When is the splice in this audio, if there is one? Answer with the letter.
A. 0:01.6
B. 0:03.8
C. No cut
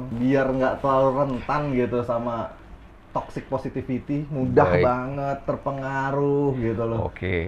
C